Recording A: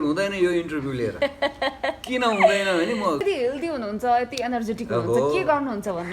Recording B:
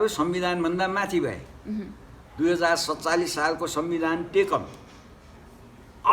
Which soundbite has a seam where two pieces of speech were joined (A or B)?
A